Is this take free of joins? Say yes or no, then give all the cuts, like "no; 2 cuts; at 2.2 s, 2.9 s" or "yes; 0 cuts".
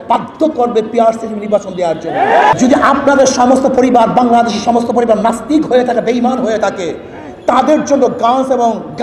no; 1 cut; at 2.5 s